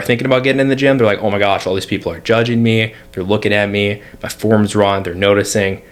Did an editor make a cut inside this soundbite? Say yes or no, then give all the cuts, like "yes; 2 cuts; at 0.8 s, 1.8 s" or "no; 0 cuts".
no; 0 cuts